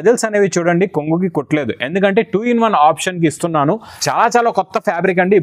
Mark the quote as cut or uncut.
cut